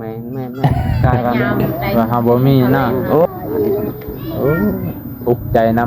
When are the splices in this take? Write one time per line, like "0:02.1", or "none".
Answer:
0:02.2